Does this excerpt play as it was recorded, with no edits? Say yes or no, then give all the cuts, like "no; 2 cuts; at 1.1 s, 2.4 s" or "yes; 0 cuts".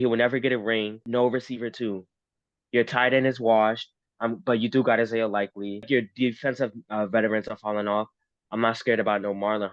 no; 2 cuts; at 1.0 s, 5.9 s